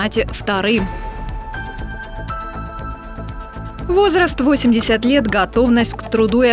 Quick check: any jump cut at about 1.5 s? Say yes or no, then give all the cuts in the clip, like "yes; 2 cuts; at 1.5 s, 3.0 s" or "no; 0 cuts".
yes; 2 cuts; at 1.5 s, 3.9 s